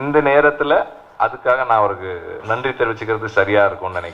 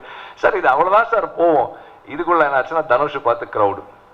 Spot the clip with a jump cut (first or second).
first